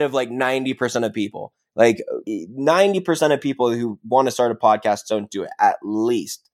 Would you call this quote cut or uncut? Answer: cut